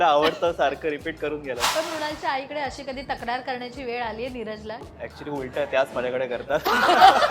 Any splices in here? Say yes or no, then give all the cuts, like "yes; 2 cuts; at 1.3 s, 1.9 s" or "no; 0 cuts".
yes; 2 cuts; at 1.6 s, 4.9 s